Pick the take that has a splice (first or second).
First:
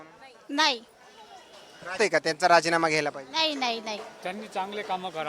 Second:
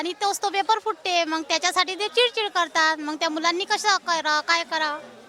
first